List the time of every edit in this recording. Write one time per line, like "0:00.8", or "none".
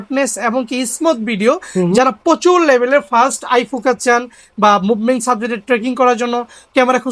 none